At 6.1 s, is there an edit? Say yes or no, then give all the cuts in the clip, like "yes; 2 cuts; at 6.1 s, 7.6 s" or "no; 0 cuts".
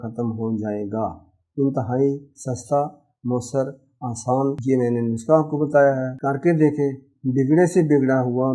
yes; 2 cuts; at 4.6 s, 6.1 s